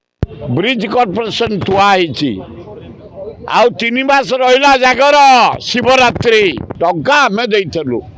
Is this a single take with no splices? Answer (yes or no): no